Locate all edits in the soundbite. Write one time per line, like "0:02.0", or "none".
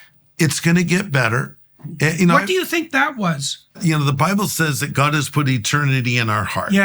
0:03.8